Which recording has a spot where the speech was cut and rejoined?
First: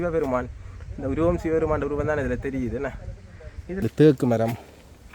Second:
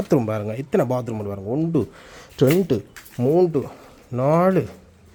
first; 1 cut; at 3.9 s

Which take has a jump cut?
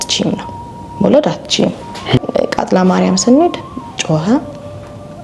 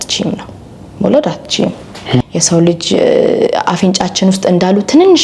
first; 1 cut; at 2.3 s

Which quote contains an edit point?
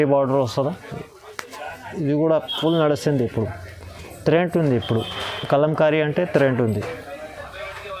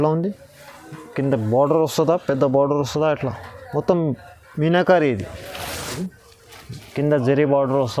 second; 1 cut; at 6.0 s

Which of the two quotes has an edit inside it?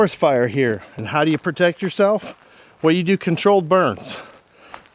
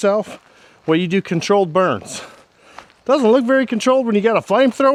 first; 1 cut; at 0.9 s

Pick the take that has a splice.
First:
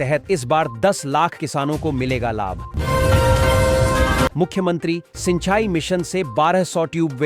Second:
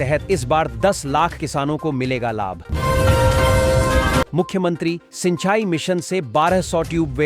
first; 2 cuts; at 2.7 s, 4.3 s

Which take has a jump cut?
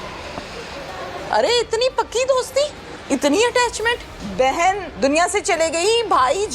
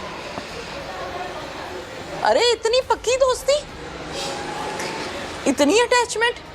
first; 4 cuts; at 1.2 s, 2.9 s, 4.2 s, 4.9 s

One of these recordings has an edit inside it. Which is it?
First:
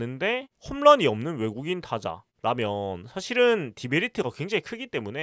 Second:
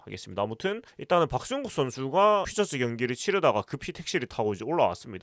second; 1 cut; at 0.9 s

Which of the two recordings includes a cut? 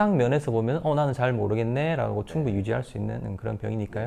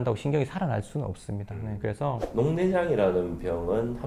second; 1 cut; at 2.2 s

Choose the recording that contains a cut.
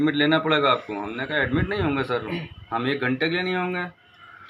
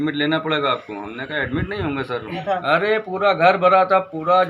second; 1 cut; at 2.4 s

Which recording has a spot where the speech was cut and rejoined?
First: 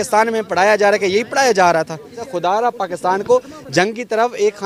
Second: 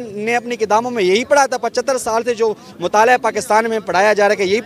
first; 1 cut; at 2.2 s

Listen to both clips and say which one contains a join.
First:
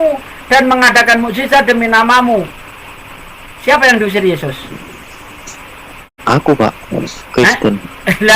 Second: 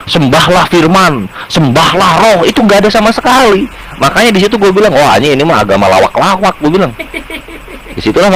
first; 1 cut; at 6.1 s

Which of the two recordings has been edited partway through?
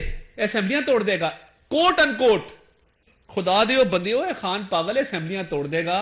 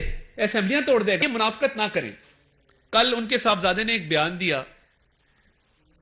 second; 1 cut; at 1.2 s

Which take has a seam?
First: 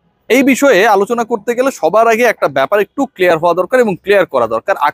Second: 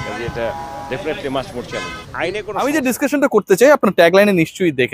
second; 1 cut; at 2.5 s

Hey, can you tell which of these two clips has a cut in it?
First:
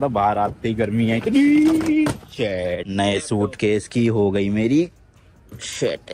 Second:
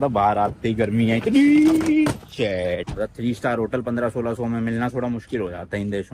second; 1 cut; at 2.9 s

